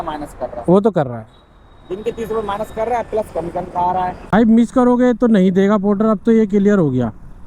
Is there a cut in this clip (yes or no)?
yes